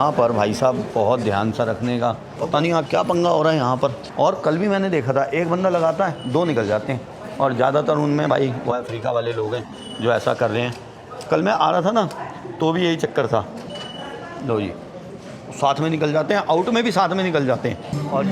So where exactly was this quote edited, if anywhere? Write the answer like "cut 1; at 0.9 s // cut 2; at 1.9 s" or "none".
none